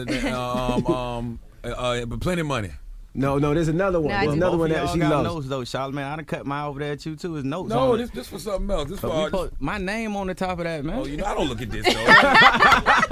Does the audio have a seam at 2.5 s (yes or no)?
yes